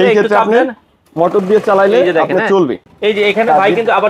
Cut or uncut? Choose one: uncut